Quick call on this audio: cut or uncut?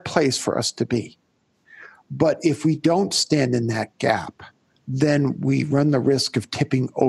uncut